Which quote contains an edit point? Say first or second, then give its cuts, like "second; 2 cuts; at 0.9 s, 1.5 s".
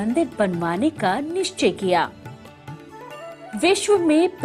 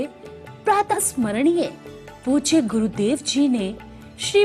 second; 1 cut; at 0.9 s